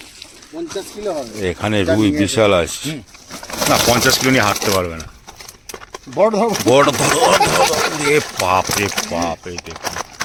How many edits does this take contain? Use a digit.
0